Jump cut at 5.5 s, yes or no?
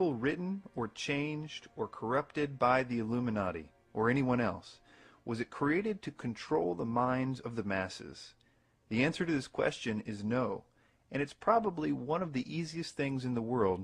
yes